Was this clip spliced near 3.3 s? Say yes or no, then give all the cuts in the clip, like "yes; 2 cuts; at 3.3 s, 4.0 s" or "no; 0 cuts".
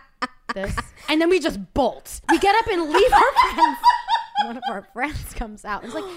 no; 3 cuts; at 1.1 s, 2.1 s, 4.6 s